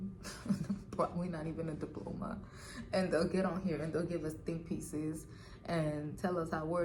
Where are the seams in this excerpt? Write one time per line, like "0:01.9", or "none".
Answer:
none